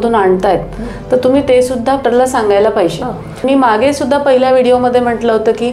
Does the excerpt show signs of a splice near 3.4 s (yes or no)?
yes